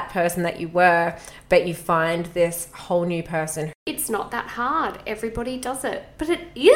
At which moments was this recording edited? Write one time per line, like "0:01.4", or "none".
0:03.8